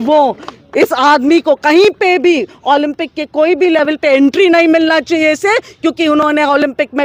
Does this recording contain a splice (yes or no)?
no